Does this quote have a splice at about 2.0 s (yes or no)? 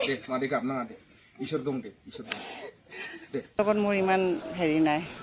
no